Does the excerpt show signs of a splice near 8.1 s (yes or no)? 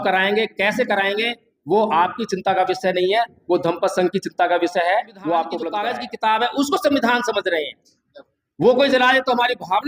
no